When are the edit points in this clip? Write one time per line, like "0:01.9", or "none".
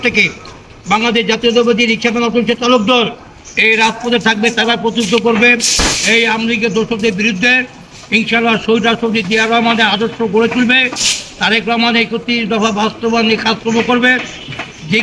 none